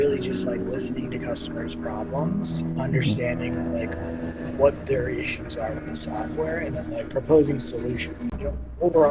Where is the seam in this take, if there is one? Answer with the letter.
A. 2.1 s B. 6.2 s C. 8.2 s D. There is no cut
C